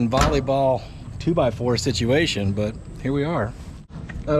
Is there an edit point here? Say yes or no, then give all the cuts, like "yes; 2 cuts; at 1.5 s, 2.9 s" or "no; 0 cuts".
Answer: no; 0 cuts